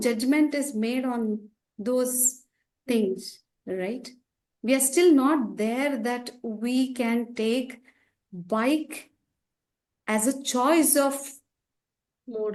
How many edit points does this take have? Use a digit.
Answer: 0